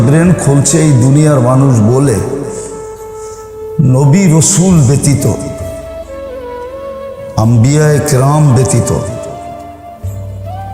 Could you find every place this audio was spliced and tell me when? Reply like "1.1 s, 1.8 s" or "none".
2.4 s, 3.8 s, 5.7 s, 7.4 s

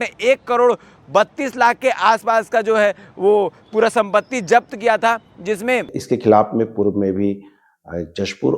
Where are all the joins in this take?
5.6 s

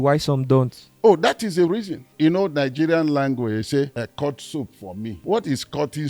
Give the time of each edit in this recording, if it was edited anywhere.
2.1 s, 3.9 s, 5.2 s

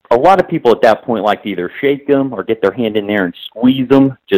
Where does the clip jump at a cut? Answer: none

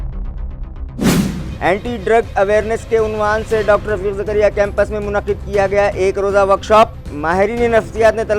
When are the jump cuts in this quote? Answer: 1.1 s

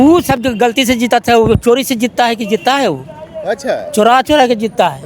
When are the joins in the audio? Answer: none

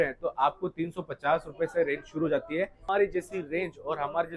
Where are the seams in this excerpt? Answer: 2.8 s

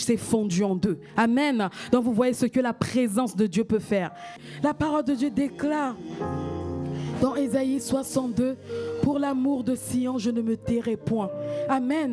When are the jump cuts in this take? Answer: 4.4 s

